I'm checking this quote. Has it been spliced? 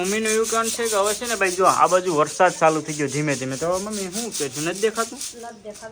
no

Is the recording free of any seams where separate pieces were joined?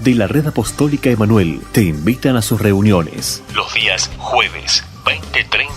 no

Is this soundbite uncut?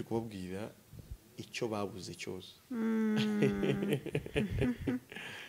yes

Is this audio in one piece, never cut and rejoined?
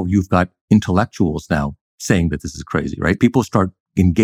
no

